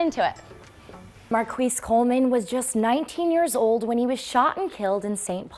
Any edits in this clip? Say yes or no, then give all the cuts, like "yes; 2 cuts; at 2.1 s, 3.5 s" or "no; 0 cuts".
yes; 1 cut; at 1.3 s